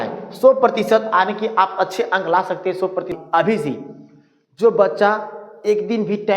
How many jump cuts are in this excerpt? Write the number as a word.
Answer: one